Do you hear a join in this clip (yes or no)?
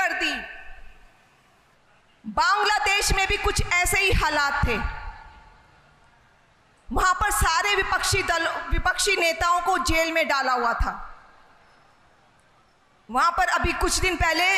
yes